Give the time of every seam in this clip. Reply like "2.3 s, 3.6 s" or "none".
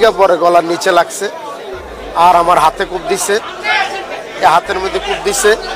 none